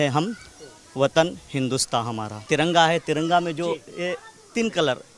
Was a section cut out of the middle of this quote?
yes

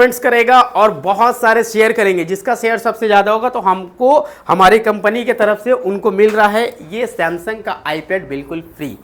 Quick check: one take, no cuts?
yes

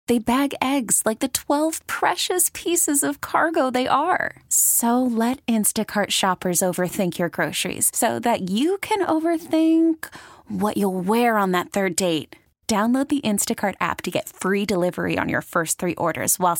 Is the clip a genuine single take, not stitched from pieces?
yes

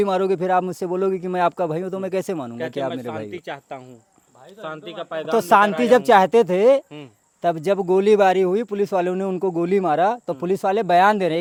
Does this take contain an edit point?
no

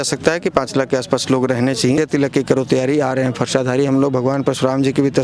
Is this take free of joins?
no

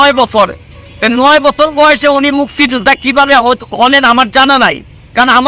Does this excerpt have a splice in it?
no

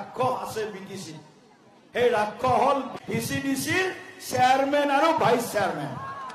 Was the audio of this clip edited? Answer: yes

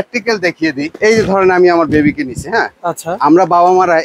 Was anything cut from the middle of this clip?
yes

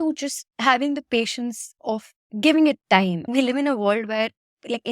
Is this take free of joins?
no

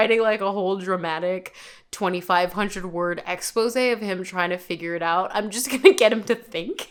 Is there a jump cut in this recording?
no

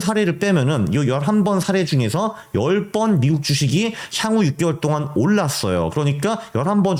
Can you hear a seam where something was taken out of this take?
no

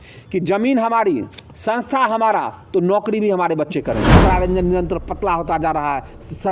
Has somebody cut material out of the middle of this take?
yes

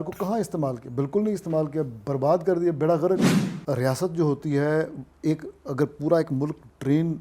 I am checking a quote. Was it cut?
yes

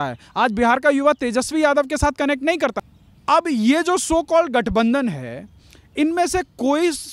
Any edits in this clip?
yes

